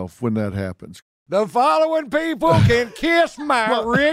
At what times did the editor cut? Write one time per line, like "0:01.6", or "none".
none